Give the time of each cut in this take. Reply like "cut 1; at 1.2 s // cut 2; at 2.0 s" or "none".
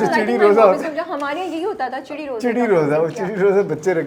none

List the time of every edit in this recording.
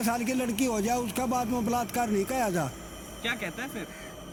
none

